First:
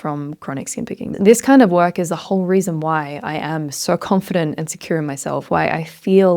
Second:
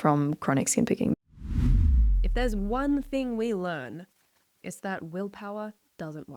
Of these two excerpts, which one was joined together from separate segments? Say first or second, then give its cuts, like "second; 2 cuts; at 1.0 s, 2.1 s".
first; 1 cut; at 1.1 s